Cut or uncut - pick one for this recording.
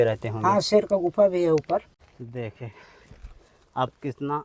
cut